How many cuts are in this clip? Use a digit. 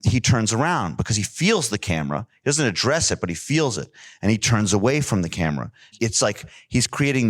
1